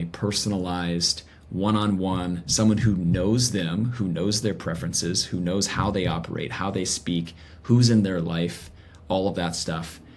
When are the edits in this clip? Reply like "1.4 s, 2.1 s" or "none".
none